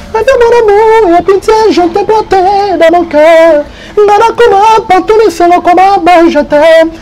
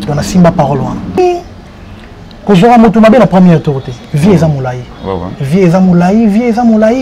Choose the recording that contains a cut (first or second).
second